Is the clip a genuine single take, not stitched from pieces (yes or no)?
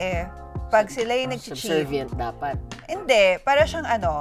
yes